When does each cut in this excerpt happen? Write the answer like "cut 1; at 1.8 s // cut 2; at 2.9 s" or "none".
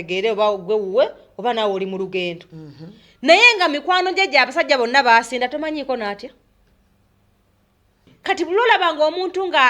cut 1; at 8.1 s

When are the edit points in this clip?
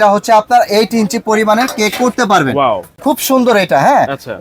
none

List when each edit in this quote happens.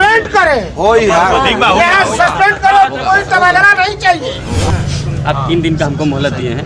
cut 1; at 4.7 s

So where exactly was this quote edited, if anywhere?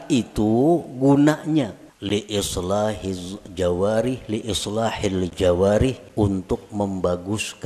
cut 1; at 1.9 s // cut 2; at 6.0 s

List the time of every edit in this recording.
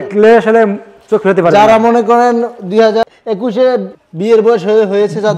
cut 1; at 3.0 s // cut 2; at 4.0 s

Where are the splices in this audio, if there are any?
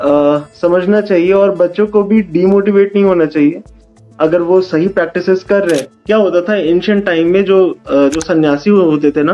cut 1; at 5.9 s

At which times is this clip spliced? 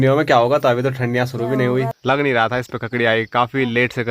cut 1; at 1.9 s

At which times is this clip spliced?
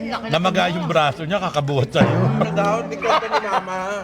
cut 1; at 2.4 s

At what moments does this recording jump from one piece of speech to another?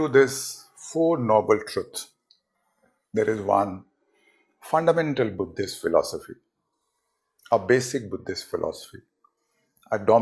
none

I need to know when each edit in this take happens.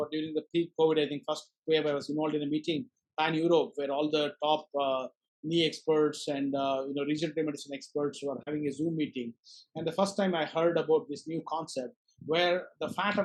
none

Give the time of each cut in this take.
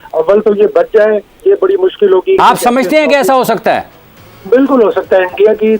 cut 1; at 2.4 s

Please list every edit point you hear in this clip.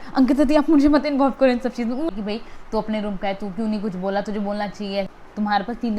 cut 1; at 2.1 s // cut 2; at 5.1 s

